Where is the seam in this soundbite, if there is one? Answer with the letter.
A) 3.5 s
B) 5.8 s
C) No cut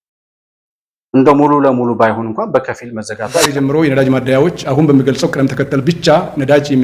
A